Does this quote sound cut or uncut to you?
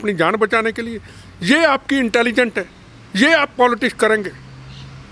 uncut